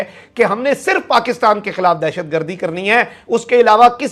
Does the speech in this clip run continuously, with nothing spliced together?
yes; 0 cuts

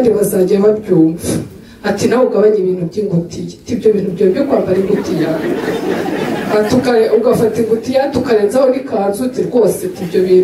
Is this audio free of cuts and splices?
yes; 0 cuts

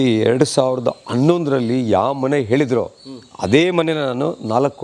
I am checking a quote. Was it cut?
no; 0 cuts

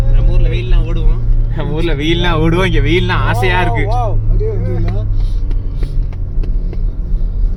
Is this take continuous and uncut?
yes; 0 cuts

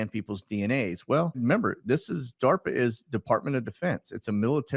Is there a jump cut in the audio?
yes; 1 cut; at 1.4 s

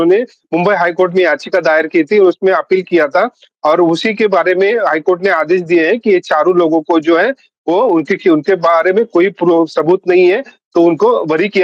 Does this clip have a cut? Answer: no; 0 cuts

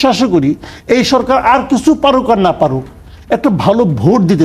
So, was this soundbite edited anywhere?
no; 0 cuts

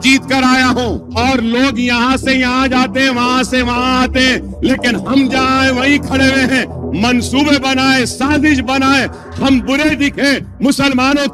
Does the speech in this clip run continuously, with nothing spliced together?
no; 1 cut; at 1.0 s

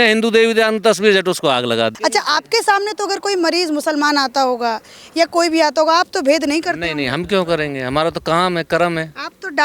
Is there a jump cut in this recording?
yes; 1 cut; at 2.0 s

